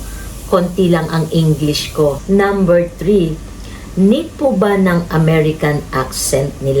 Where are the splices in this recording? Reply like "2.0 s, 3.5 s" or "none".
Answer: 2.2 s